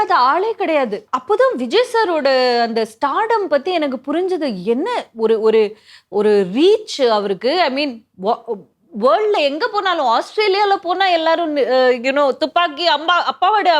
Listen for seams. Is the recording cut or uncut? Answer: cut